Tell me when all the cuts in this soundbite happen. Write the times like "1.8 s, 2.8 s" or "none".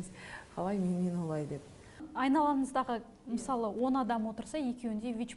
2.1 s